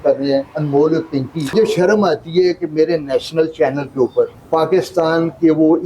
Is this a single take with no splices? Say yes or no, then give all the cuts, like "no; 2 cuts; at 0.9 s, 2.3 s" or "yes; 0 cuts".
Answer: no; 2 cuts; at 1.5 s, 4.4 s